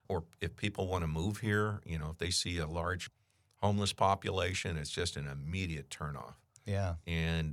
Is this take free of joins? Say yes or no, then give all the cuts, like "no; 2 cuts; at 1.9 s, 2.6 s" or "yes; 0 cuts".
yes; 0 cuts